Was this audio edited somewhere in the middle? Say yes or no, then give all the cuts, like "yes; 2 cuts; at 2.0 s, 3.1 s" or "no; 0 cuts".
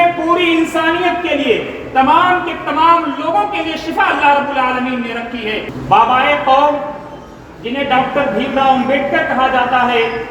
yes; 1 cut; at 5.7 s